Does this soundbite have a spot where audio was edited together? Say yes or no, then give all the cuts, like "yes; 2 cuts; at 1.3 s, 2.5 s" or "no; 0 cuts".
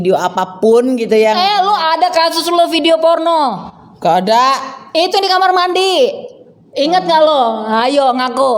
no; 0 cuts